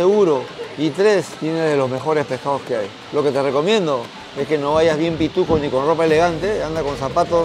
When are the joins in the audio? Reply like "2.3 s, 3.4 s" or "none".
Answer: 1.3 s, 3.0 s